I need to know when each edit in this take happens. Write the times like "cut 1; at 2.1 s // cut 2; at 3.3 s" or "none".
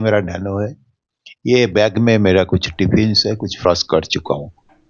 cut 1; at 3.6 s